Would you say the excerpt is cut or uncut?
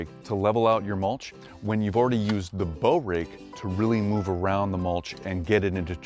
uncut